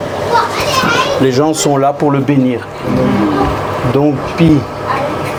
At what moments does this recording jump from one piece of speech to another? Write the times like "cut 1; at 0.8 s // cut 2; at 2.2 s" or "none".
none